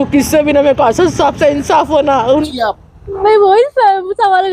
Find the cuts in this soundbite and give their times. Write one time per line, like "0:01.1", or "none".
0:02.5